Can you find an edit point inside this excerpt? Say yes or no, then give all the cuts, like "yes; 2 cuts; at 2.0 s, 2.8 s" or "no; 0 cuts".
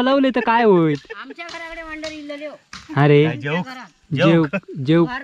no; 0 cuts